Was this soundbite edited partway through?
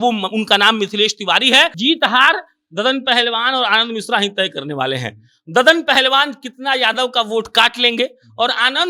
yes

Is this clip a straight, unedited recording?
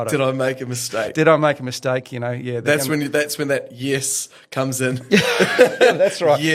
yes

